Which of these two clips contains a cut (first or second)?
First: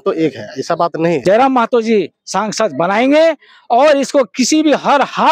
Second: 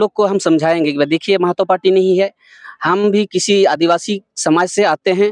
first